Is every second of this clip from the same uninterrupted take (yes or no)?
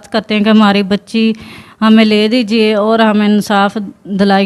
yes